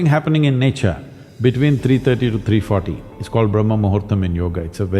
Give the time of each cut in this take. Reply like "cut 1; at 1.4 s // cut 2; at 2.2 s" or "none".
none